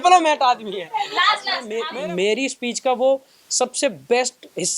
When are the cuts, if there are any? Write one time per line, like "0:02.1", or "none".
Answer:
0:01.8